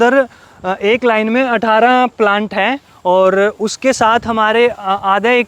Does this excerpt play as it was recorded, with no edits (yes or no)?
yes